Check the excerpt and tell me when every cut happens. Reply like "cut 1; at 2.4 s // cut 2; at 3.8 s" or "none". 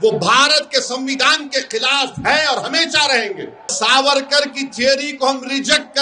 cut 1; at 3.7 s

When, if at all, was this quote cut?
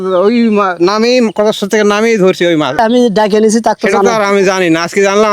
cut 1; at 2.8 s

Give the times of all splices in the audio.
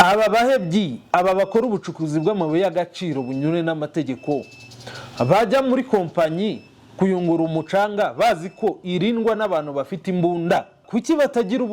cut 1; at 10.8 s

